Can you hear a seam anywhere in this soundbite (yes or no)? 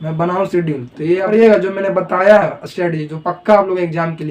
yes